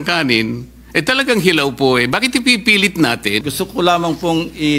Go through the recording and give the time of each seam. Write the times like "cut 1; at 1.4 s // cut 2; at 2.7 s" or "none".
cut 1; at 3.5 s